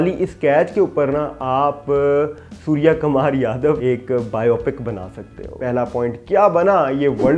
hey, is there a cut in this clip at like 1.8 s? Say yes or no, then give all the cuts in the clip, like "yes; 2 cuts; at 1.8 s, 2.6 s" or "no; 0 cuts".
no; 2 cuts; at 3.8 s, 5.5 s